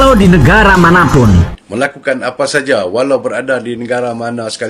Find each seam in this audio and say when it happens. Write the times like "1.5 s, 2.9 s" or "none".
1.6 s